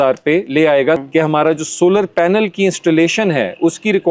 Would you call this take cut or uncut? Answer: cut